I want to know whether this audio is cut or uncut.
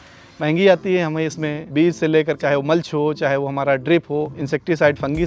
cut